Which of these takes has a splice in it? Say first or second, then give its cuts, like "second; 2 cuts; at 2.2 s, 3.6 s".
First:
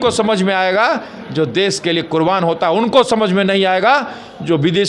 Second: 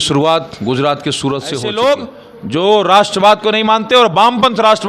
second; 1 cut; at 1.5 s